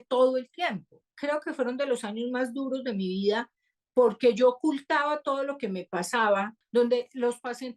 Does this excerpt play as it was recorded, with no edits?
no; 2 cuts; at 1.1 s, 6.6 s

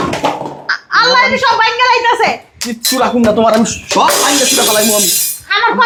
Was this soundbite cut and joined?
no; 0 cuts

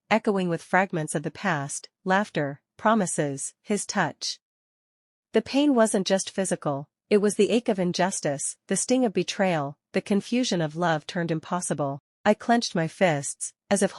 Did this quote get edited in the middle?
yes; 1 cut; at 12.1 s

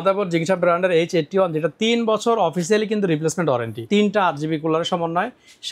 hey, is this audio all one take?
no; 1 cut; at 3.8 s

